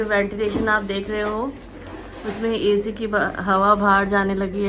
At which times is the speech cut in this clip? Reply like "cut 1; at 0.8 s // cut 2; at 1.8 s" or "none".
none